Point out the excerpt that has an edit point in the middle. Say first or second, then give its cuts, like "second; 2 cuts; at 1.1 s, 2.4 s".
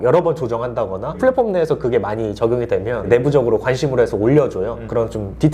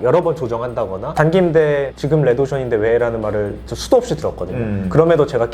second; 1 cut; at 1.1 s